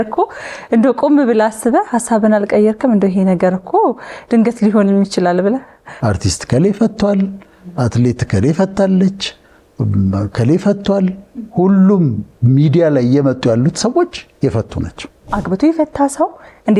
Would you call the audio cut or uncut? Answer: cut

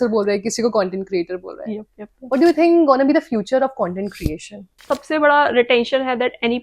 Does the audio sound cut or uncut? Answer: cut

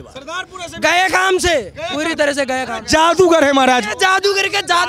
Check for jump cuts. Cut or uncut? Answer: uncut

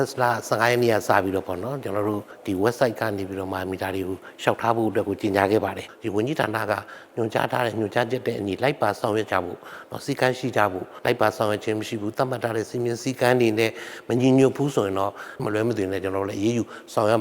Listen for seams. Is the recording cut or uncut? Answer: cut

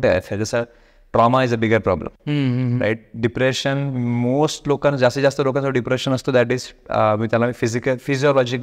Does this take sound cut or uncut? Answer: uncut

